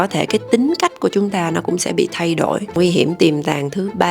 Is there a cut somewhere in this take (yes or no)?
yes